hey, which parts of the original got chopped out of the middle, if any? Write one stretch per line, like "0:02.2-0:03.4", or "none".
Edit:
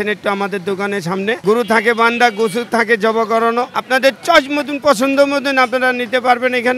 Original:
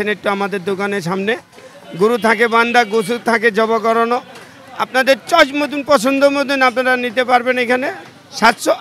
0:01.4-0:01.9
0:04.3-0:04.8

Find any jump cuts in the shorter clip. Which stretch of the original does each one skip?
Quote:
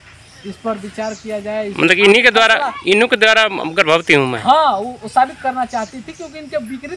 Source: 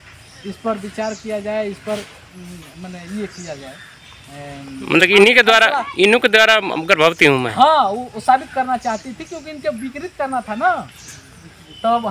0:01.7-0:04.9

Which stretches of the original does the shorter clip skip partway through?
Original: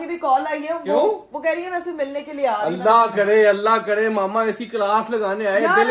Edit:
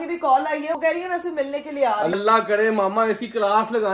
0:00.8-0:01.4
0:02.8-0:03.6

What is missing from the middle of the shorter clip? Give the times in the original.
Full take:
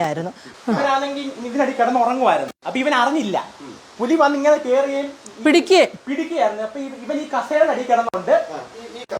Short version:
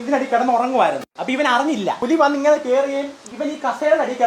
0:03.5-0:04.0
0:05.2-0:06.9

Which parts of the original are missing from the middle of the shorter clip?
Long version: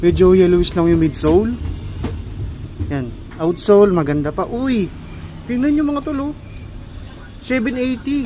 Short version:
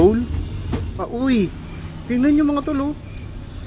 0:02.3-0:04.4

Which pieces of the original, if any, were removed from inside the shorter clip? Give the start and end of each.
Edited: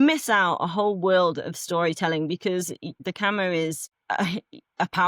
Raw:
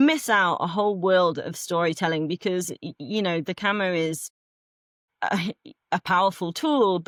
0:03.0-0:03.5
0:04.3-0:05.0

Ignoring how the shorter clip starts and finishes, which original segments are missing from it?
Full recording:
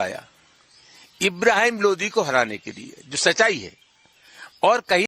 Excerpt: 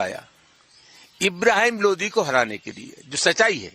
none

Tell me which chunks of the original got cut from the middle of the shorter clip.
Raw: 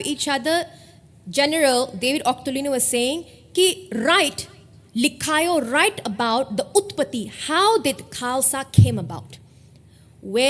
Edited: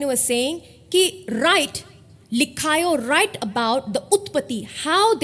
none

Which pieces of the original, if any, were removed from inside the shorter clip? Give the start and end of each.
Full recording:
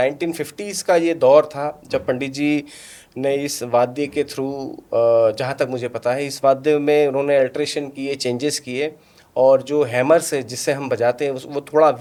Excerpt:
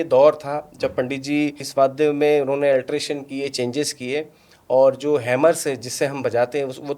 0:02.7-0:06.3

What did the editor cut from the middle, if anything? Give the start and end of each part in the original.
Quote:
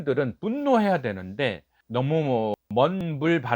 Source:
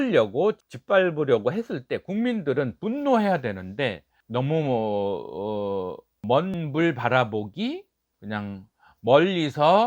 0:04.9-0:06.1

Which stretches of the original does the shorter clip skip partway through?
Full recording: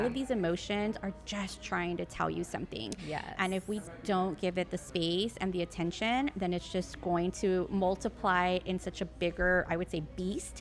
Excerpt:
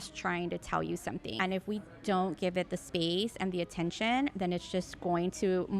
0:02.8-0:03.3

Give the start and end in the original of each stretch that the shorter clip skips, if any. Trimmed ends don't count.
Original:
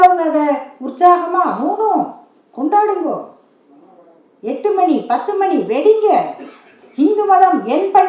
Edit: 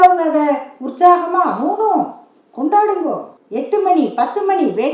0:03.4-0:04.3

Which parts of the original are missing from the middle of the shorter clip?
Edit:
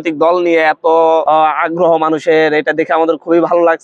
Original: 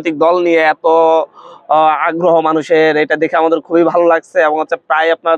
0:01.2-0:01.7

